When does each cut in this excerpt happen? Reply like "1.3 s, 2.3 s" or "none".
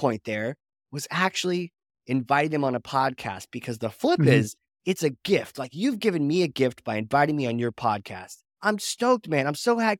none